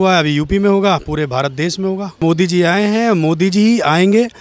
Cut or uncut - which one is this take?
cut